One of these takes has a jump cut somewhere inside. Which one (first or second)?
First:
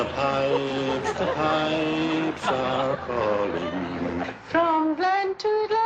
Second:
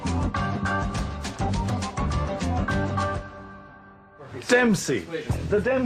second